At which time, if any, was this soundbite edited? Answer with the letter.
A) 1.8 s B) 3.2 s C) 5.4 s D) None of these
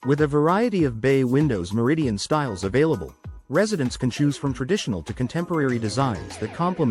D